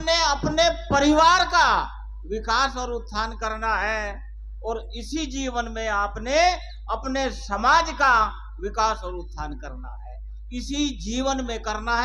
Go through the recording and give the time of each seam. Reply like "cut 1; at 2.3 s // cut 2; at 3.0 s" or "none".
none